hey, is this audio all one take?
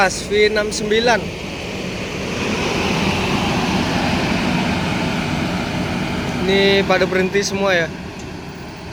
yes; 0 cuts

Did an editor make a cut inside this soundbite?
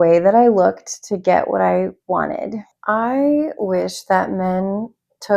yes; 1 cut; at 2.7 s

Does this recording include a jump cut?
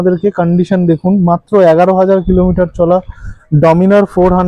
no; 0 cuts

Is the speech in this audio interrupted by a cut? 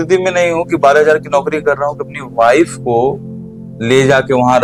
no; 0 cuts

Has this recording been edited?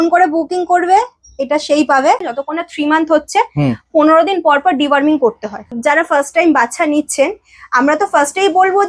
yes; 2 cuts; at 2.2 s, 5.7 s

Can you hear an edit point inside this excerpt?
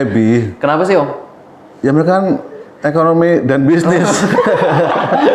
no; 0 cuts

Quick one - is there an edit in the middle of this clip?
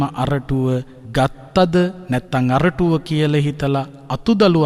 yes; 1 cut; at 1.0 s

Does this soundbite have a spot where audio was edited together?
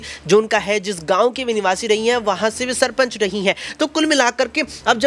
no; 0 cuts

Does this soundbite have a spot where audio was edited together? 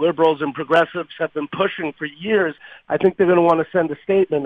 yes; 1 cut; at 2.7 s

